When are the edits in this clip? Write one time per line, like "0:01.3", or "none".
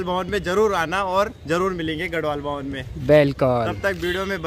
none